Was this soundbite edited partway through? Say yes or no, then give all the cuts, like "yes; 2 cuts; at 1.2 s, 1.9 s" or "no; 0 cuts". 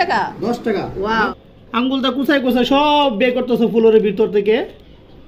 yes; 1 cut; at 1.4 s